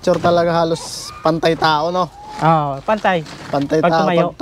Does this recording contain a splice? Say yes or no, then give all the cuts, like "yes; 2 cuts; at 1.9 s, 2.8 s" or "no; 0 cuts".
no; 0 cuts